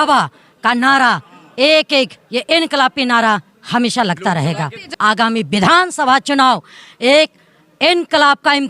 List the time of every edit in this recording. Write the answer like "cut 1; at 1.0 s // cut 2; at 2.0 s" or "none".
cut 1; at 4.8 s